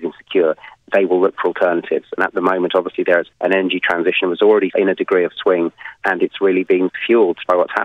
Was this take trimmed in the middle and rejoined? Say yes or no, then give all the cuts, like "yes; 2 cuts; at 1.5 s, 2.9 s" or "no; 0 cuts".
yes; 2 cuts; at 3.3 s, 6.9 s